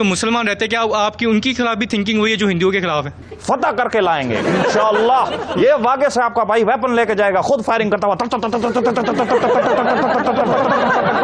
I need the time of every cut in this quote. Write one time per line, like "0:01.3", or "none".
0:03.1